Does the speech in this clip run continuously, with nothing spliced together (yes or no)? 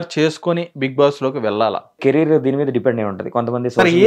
no